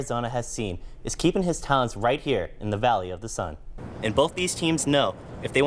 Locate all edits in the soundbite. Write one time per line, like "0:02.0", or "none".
0:03.9